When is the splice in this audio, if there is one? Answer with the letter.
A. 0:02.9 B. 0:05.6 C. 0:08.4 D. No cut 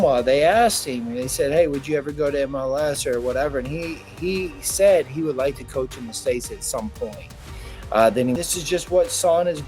C